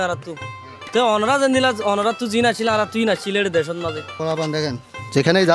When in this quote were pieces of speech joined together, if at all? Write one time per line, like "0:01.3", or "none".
0:04.1

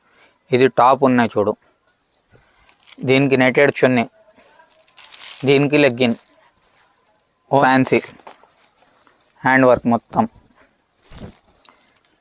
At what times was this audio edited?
0:07.6

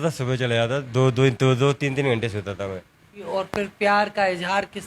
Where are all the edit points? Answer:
0:03.3

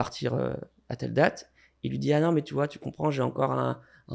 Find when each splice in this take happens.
none

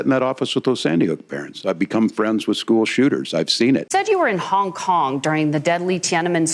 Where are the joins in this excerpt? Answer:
0:03.9

